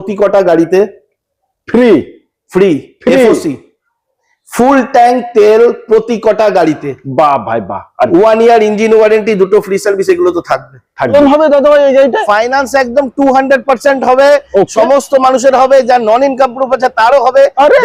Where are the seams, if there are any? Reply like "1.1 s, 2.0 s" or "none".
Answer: 11.1 s

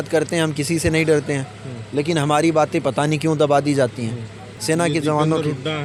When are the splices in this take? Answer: none

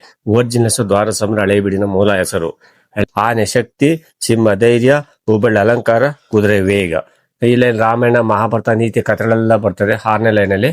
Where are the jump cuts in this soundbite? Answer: 2.9 s

